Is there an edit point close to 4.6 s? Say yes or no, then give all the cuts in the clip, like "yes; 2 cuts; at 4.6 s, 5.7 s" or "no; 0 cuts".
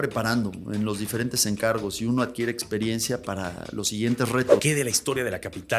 yes; 1 cut; at 4.6 s